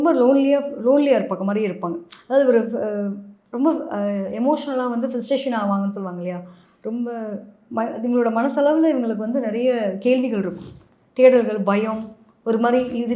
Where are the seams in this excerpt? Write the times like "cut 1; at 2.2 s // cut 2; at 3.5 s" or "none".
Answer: none

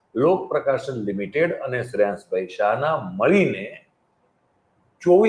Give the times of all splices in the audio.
none

